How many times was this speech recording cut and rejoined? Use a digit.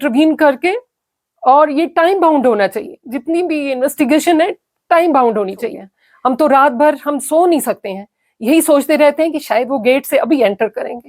1